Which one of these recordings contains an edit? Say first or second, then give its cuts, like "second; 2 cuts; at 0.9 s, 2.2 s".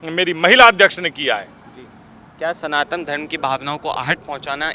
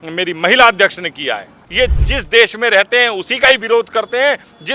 second; 1 cut; at 1.6 s